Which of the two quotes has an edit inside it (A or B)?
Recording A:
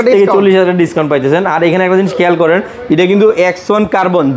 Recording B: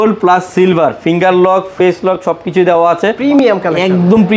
B